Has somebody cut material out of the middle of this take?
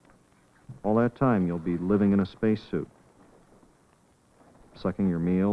yes; 1 cut; at 3.5 s

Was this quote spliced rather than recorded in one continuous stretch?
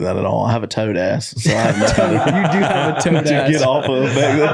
no; 0 cuts

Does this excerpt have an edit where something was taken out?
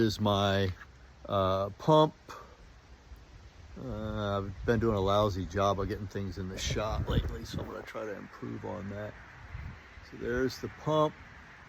no; 0 cuts

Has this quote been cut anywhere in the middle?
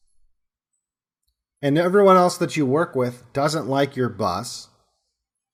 no; 0 cuts

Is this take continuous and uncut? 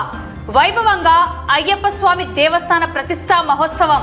yes; 0 cuts

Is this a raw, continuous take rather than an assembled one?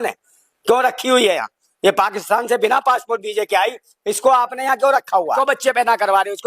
no; 1 cut; at 5.4 s

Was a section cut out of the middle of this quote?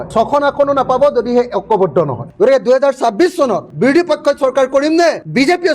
yes; 2 cuts; at 2.3 s, 3.7 s

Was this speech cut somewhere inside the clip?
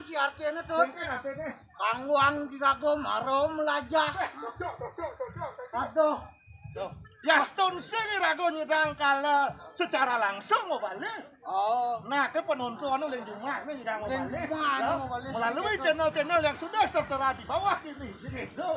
yes; 1 cut; at 6.7 s

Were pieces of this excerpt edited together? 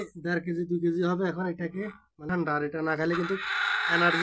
yes; 1 cut; at 2.1 s

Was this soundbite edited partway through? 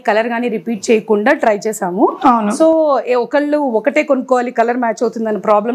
no; 0 cuts

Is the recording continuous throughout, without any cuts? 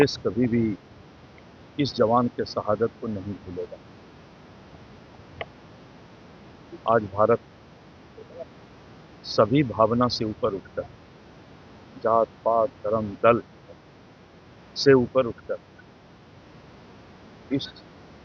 yes; 0 cuts

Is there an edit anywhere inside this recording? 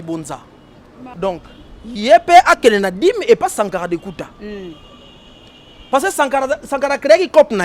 yes; 1 cut; at 1.1 s

